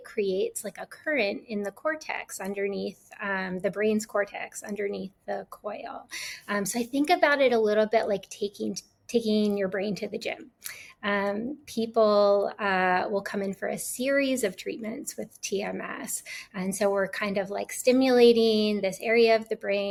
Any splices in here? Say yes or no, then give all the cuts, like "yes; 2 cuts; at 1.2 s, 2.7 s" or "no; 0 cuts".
no; 0 cuts